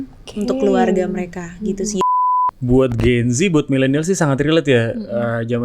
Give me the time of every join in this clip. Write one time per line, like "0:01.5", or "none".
0:02.0

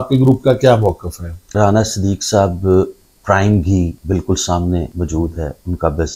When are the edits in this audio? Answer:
0:01.5
0:04.0
0:04.9

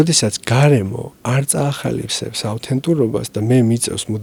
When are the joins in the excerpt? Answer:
none

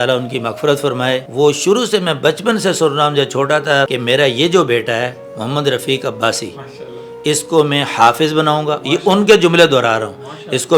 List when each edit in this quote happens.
0:01.3
0:03.9

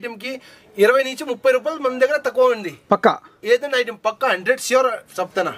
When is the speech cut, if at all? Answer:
none

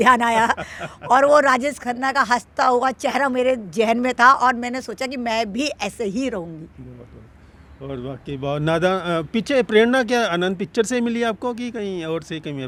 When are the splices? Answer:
none

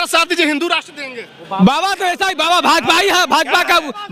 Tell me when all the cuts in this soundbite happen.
none

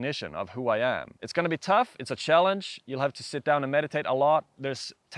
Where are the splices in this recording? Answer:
0:01.2

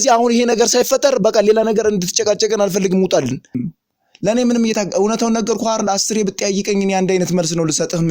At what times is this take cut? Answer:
0:03.6

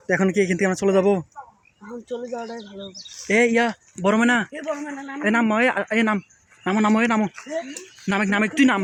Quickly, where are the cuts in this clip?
none

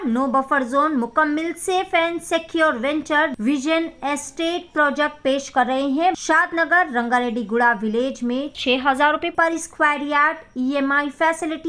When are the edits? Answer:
0:03.3
0:06.2

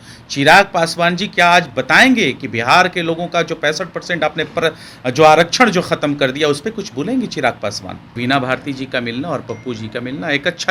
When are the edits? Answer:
0:08.1

